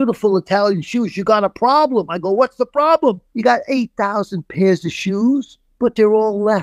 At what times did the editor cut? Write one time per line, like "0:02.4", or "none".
0:03.3
0:05.6